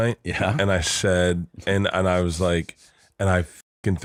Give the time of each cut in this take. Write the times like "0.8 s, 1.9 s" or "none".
none